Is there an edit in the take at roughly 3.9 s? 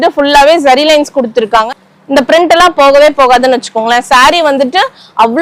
no; 1 cut; at 1.7 s

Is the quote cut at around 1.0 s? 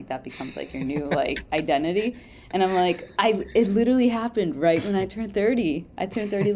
no; 0 cuts

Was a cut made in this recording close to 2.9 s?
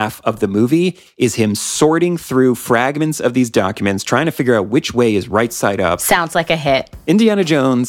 no; 2 cuts; at 6.0 s, 6.9 s

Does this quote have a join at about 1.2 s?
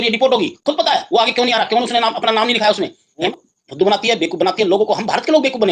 no; 1 cut; at 3.3 s

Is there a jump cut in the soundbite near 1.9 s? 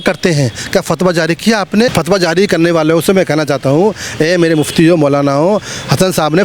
yes; 1 cut; at 1.9 s

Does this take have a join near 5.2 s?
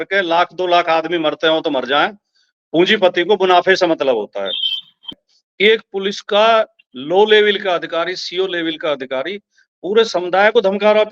yes; 1 cut; at 5.2 s

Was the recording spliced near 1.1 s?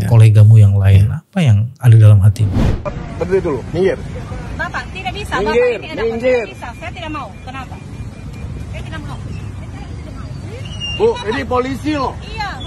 no; 1 cut; at 2.7 s

